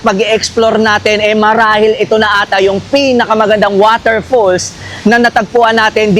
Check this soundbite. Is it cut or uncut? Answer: uncut